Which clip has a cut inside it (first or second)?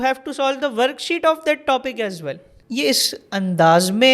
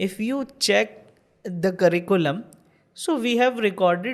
first